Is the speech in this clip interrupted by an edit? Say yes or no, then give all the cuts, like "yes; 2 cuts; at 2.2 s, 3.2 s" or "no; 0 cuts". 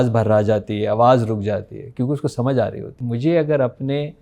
yes; 1 cut; at 3.0 s